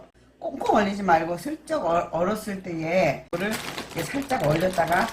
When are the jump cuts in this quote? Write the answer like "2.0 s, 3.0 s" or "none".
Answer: 3.3 s